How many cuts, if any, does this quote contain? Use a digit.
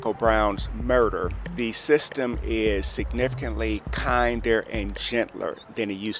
1